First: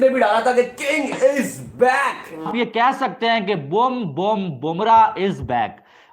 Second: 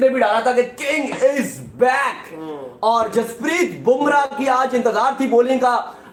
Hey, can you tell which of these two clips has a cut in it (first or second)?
first